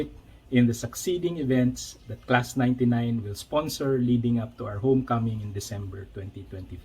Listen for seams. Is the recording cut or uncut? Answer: cut